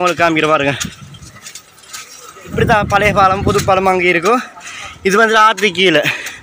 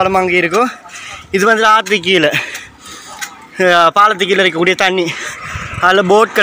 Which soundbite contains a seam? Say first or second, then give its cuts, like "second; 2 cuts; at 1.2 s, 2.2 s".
first; 1 cut; at 2.5 s